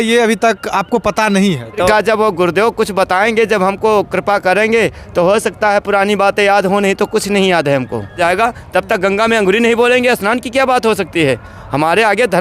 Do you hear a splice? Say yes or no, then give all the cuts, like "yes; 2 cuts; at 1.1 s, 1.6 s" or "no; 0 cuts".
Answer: yes; 2 cuts; at 1.9 s, 8.2 s